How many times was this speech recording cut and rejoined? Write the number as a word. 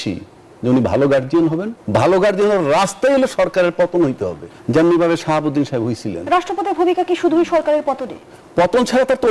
two